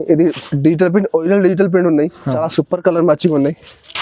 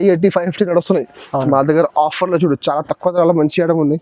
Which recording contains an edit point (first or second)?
first